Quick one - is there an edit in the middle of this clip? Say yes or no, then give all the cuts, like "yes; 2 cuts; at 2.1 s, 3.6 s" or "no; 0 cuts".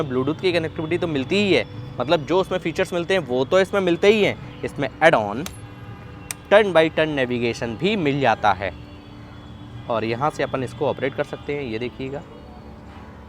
no; 0 cuts